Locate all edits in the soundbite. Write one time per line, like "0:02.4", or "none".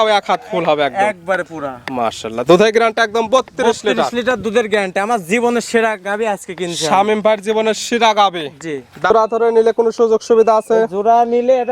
0:09.1